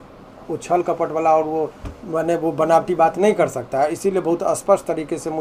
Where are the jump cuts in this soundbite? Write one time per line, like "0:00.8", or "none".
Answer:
none

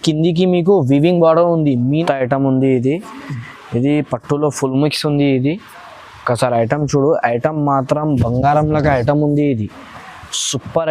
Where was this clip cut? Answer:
0:02.0

